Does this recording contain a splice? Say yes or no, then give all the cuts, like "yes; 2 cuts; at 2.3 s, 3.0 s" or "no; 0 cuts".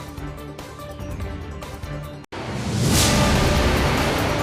no; 0 cuts